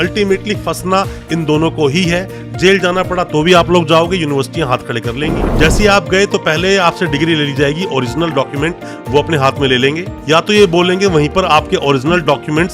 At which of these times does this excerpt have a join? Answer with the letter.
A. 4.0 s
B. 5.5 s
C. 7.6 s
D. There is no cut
B